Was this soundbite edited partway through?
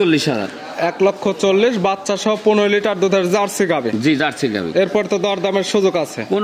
no; 0 cuts

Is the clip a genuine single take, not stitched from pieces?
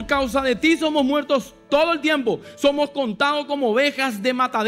yes; 0 cuts

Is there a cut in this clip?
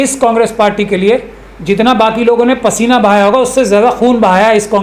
no; 0 cuts

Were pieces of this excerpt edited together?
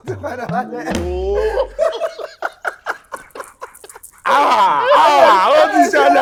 no; 0 cuts

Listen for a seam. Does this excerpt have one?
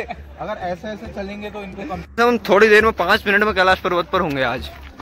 yes; 1 cut; at 2.1 s

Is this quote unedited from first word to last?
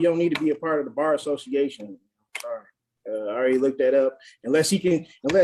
yes; 0 cuts

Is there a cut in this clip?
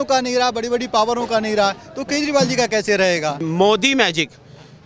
yes; 1 cut; at 3.4 s

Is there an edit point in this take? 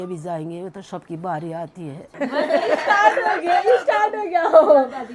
no; 0 cuts

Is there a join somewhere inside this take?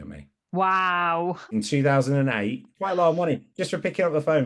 yes; 2 cuts; at 1.5 s, 2.7 s

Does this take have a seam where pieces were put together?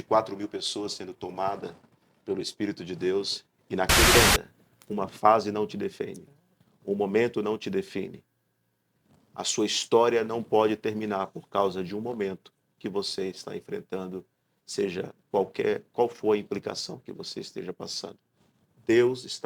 yes; 1 cut; at 4.1 s

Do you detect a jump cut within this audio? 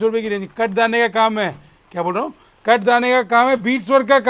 no; 0 cuts

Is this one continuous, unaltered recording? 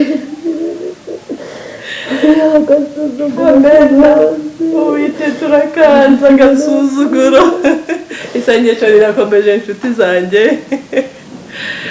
yes; 0 cuts

